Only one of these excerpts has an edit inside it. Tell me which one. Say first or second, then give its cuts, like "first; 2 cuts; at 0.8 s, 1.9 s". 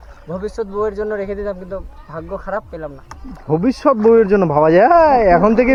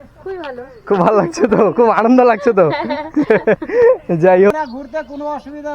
second; 1 cut; at 4.5 s